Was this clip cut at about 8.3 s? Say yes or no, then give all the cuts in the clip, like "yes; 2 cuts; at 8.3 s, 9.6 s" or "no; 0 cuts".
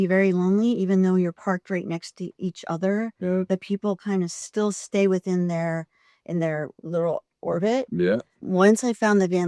yes; 2 cuts; at 4.4 s, 8.3 s